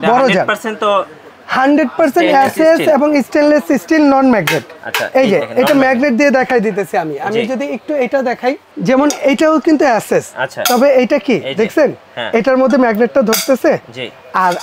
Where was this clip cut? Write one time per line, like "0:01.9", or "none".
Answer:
0:08.7

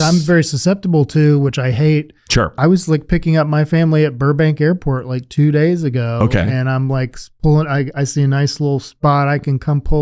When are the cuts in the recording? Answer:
0:02.5

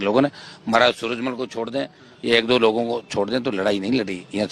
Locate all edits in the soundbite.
none

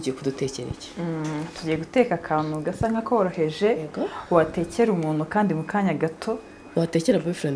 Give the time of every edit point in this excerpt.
none

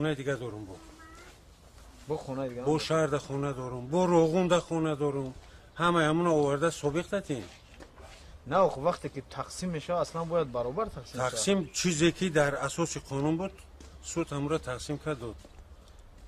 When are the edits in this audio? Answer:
0:11.4

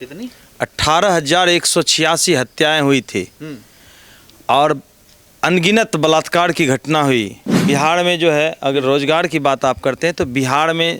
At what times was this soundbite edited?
0:07.5

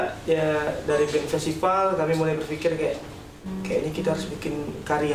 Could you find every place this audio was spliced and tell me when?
none

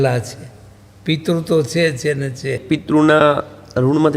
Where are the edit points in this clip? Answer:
0:02.6

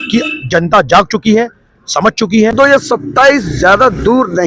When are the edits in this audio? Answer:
0:02.5

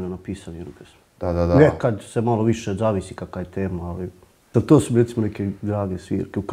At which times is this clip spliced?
0:04.5

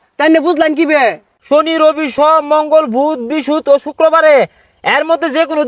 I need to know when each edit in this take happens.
0:01.3

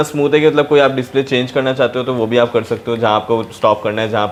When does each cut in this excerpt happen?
none

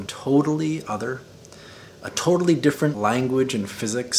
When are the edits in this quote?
0:03.0

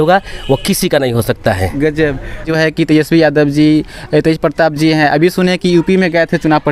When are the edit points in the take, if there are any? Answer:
0:02.5

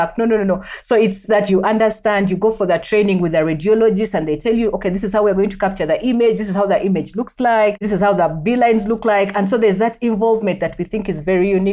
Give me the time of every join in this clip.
0:01.5
0:07.8

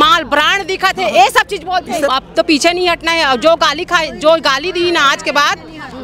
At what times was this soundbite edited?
0:02.0

